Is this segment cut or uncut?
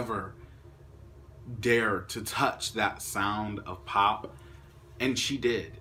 uncut